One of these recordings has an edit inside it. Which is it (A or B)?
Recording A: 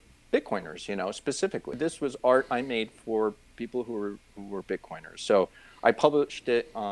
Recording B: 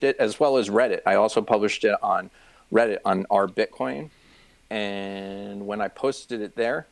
A